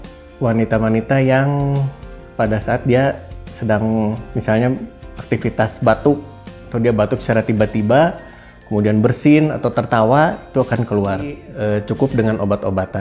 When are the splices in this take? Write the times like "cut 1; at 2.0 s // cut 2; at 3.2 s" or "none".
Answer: cut 1; at 11.5 s

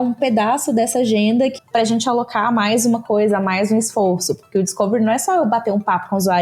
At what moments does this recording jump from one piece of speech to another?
cut 1; at 1.5 s

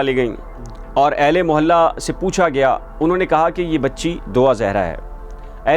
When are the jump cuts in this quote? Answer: none

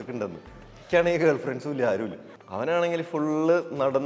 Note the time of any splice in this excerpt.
cut 1; at 2.2 s

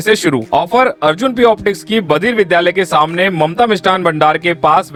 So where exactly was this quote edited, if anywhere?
none

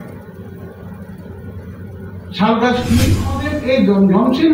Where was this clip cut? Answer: cut 1; at 3.5 s

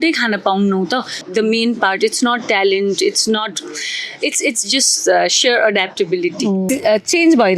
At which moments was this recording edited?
cut 1; at 1.2 s // cut 2; at 6.6 s

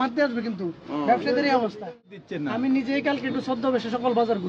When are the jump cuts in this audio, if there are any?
cut 1; at 2.2 s

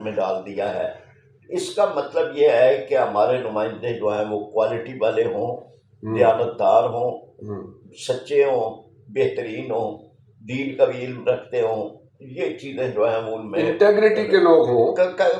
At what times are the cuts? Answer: none

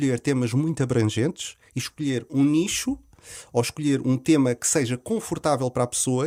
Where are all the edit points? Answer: none

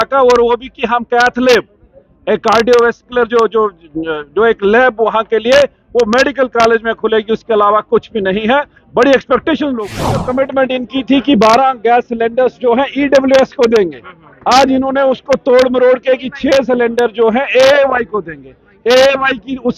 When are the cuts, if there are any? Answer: cut 1; at 10.2 s

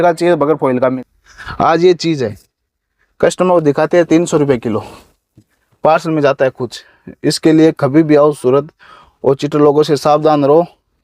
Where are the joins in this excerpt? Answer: cut 1; at 1.0 s

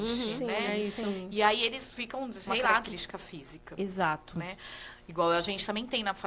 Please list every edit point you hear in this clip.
cut 1; at 2.9 s

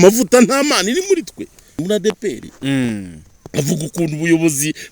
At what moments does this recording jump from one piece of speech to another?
cut 1; at 1.8 s

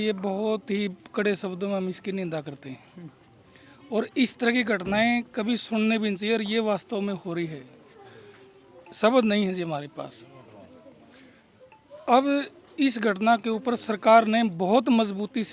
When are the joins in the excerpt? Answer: none

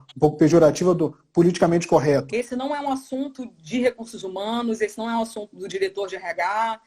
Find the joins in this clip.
cut 1; at 2.3 s

